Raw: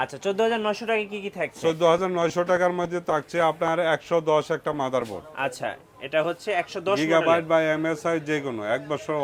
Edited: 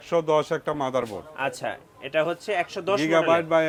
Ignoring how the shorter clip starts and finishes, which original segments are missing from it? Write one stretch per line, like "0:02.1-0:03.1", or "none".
none